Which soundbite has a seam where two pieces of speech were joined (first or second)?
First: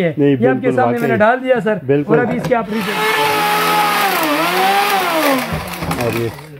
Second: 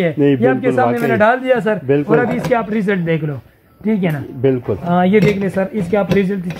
first